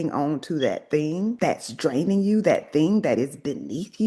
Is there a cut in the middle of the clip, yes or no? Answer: no